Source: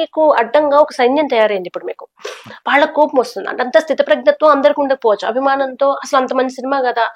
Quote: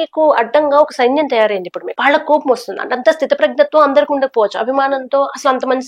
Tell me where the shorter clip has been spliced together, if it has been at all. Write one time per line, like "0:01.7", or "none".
0:01.8

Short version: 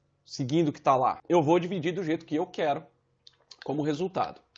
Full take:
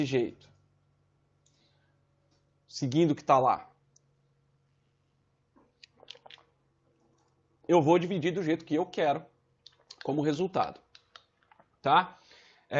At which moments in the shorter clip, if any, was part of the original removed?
0:01.2

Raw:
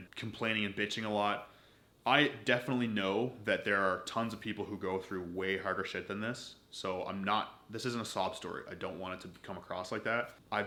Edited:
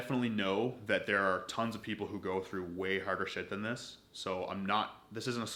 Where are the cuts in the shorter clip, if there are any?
none

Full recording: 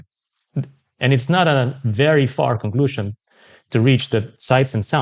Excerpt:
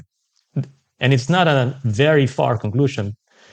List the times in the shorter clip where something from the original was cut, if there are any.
none

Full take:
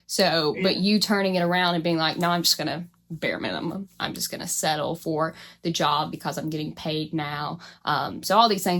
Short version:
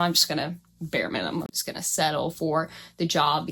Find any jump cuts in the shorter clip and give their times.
0:01.6

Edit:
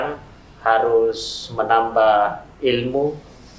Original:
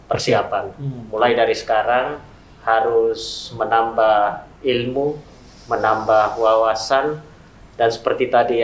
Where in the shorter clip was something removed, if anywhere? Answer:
none

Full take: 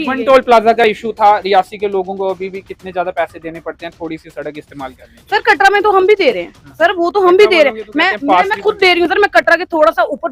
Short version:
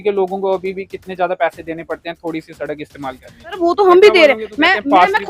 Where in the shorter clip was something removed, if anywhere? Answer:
0:03.5

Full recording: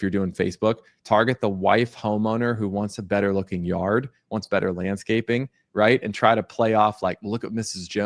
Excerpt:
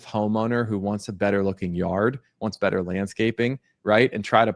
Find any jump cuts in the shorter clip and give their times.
none

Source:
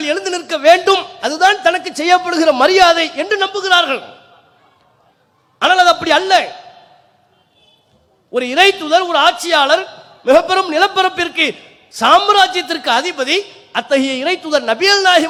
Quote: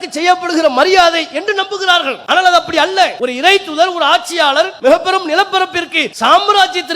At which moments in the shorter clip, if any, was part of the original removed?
0:02.2
0:03.1
0:04.7
0:06.0

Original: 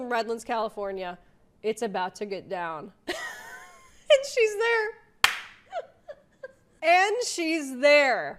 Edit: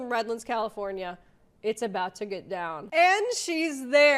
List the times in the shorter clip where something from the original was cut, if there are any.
0:02.8

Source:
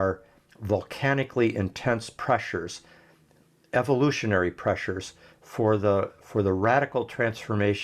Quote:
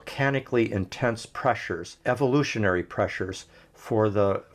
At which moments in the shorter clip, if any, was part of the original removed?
0:01.9

